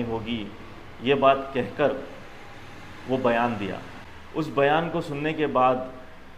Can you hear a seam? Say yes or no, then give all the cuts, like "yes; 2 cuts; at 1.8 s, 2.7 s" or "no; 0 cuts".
no; 0 cuts